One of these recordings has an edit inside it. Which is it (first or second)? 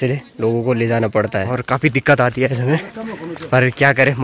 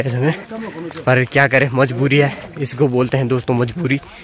first